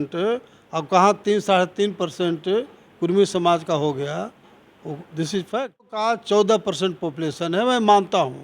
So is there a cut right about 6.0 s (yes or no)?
yes